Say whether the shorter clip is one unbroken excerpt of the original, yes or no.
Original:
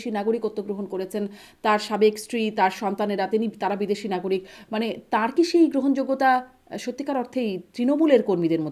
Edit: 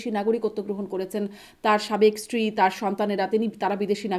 yes